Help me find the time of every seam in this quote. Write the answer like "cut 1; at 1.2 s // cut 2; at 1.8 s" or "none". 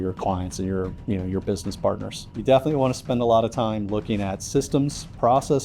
cut 1; at 2.2 s